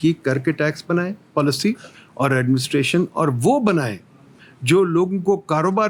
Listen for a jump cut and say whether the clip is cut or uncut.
uncut